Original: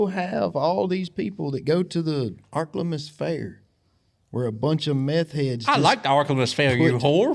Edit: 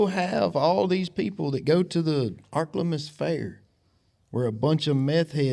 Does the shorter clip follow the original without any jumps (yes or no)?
yes